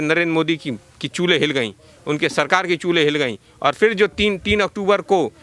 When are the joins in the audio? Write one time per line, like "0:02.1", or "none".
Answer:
none